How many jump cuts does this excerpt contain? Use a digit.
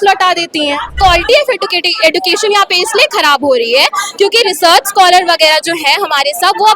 1